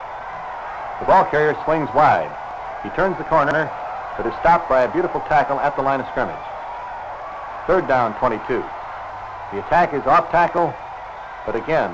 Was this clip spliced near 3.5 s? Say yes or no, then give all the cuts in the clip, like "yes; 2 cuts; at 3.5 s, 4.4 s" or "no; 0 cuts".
yes; 1 cut; at 3.5 s